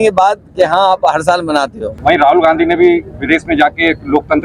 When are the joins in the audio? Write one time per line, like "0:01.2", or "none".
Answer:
0:01.9